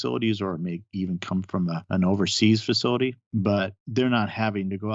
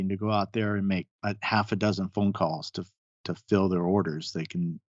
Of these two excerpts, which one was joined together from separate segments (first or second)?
first